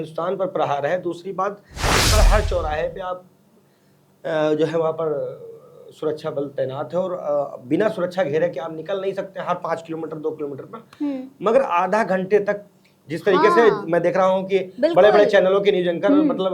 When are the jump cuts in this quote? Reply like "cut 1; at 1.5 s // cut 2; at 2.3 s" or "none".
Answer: cut 1; at 2.0 s